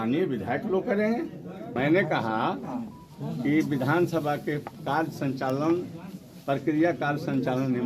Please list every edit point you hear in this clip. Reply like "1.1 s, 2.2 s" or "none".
1.7 s